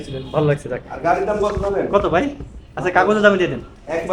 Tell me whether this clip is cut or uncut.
uncut